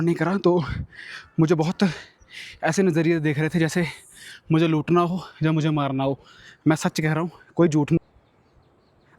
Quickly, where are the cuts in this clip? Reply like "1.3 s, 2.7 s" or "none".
8.0 s